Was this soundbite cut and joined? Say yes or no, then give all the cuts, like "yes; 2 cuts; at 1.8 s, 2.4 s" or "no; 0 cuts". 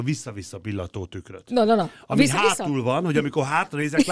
no; 0 cuts